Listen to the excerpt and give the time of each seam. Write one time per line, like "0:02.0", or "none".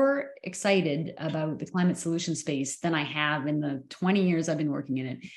none